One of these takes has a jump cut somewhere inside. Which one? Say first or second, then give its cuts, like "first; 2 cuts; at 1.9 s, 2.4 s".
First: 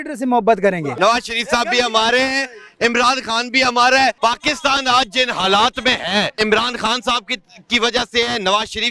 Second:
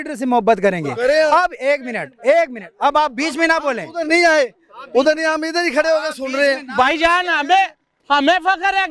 first; 3 cuts; at 0.9 s, 4.2 s, 6.3 s